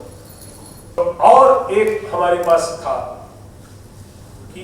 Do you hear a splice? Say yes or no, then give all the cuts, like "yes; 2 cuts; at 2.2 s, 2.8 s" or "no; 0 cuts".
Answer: yes; 1 cut; at 1.0 s